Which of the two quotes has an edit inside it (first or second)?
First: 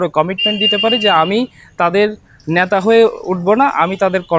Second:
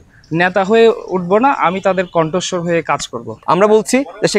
second